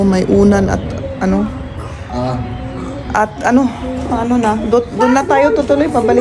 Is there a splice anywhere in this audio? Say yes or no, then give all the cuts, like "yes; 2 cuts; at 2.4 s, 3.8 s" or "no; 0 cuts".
no; 0 cuts